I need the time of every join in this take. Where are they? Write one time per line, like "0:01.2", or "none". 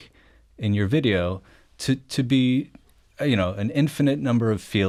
none